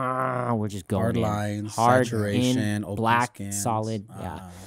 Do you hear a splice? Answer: no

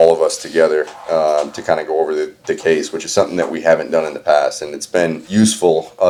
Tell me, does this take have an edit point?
no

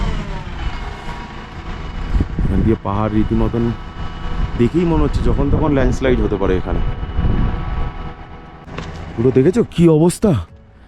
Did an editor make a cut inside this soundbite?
yes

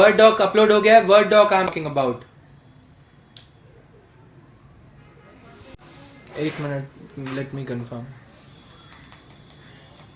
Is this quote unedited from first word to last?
no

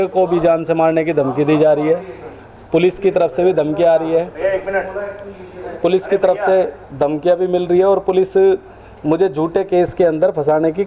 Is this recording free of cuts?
yes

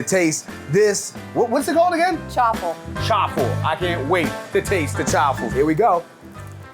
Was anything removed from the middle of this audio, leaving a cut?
yes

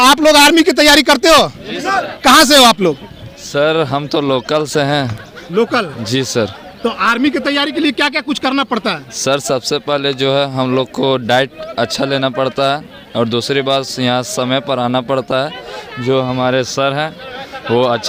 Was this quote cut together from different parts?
no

